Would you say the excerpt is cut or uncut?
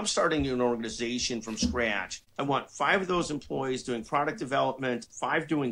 uncut